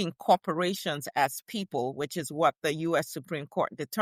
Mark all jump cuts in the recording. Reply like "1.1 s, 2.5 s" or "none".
none